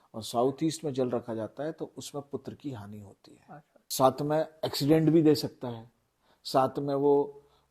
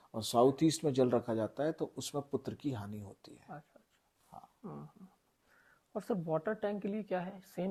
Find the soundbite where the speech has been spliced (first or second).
first